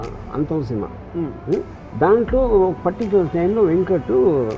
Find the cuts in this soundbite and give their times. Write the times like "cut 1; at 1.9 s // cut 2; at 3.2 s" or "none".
cut 1; at 1.8 s